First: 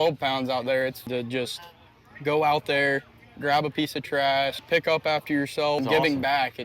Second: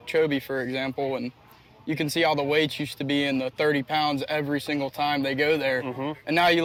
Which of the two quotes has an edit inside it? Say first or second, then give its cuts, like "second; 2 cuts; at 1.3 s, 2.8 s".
first; 3 cuts; at 1.1 s, 4.6 s, 5.8 s